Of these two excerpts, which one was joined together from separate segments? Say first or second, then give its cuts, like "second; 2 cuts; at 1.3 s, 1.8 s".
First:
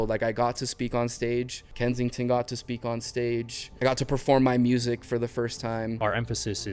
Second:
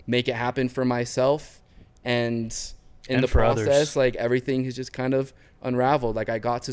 first; 3 cuts; at 1.6 s, 3.6 s, 6.0 s